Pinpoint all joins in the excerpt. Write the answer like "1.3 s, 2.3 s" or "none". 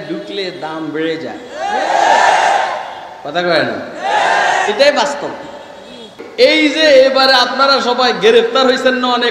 6.2 s